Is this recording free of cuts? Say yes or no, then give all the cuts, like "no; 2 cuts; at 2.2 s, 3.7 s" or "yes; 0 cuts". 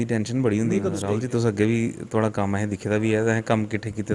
no; 1 cut; at 1.0 s